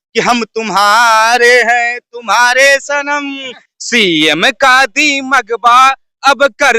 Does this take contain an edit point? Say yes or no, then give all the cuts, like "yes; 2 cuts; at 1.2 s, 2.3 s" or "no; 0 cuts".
yes; 1 cut; at 3.7 s